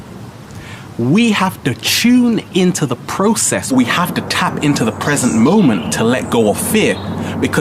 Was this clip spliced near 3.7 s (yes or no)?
yes